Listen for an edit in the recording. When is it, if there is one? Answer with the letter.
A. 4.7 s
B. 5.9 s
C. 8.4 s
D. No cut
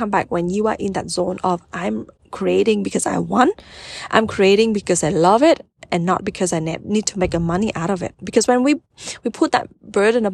D